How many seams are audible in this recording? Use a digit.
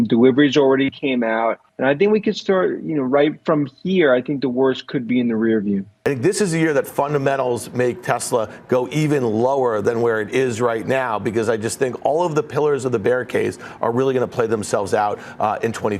2